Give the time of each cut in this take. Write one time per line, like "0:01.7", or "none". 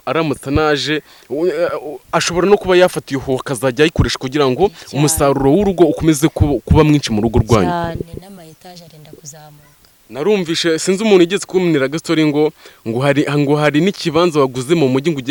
none